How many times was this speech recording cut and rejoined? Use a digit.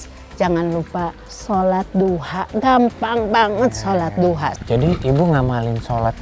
2